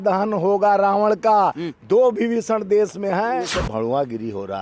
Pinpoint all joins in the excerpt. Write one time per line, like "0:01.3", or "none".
0:03.5

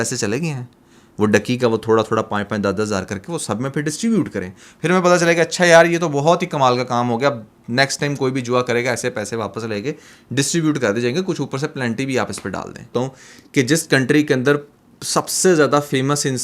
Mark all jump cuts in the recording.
0:12.9

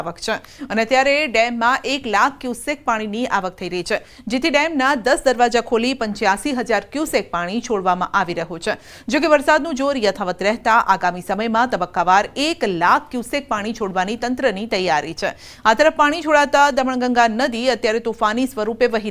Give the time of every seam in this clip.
none

